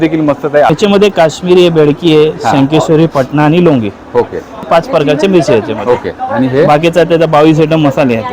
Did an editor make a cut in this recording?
yes; 2 cuts; at 0.7 s, 4.7 s

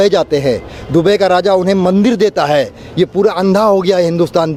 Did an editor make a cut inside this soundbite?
no; 0 cuts

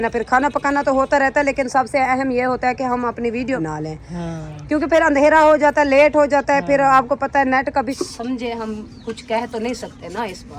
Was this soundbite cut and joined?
yes; 2 cuts; at 3.6 s, 7.9 s

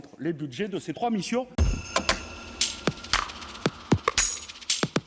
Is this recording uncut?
no; 1 cut; at 1.5 s

